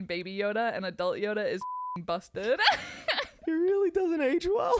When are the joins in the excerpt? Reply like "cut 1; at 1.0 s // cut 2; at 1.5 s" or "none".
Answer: cut 1; at 3.4 s

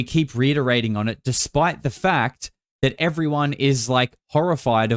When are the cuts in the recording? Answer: none

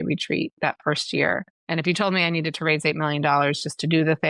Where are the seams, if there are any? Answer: cut 1; at 1.5 s

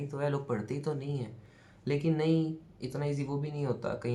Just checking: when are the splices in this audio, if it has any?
none

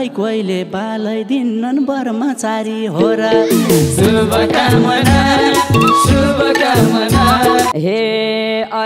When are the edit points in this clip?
cut 1; at 7.7 s

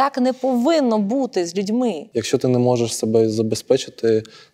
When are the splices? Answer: cut 1; at 2.0 s

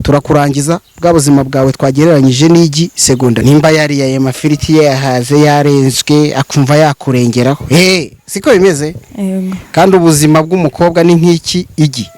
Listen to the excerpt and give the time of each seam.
cut 1; at 3.4 s

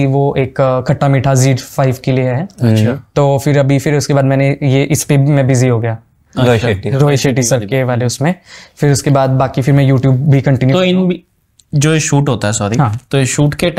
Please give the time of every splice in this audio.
none

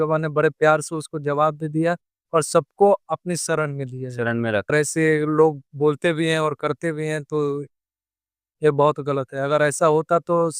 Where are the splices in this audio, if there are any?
cut 1; at 4.7 s

